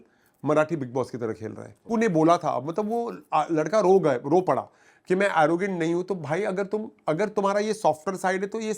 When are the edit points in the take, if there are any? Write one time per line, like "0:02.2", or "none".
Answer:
0:01.8